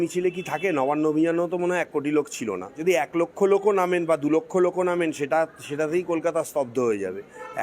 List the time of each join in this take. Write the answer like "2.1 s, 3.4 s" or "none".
2.7 s